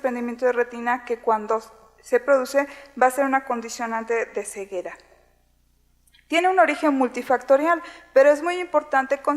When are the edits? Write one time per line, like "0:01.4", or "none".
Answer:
0:06.5